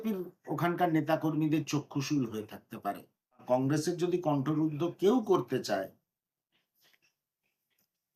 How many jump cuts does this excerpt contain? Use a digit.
1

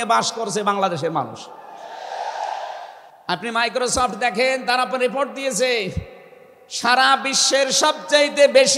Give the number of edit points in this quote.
1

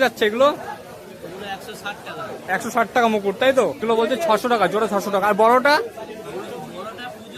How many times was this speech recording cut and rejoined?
1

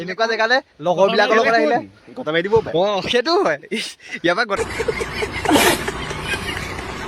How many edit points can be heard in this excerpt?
1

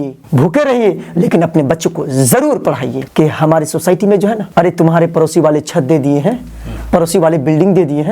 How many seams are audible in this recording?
1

